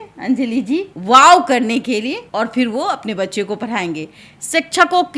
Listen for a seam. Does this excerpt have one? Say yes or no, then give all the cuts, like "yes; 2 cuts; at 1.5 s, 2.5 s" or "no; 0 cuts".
yes; 3 cuts; at 0.9 s, 2.2 s, 4.3 s